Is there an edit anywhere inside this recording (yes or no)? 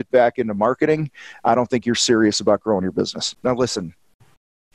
yes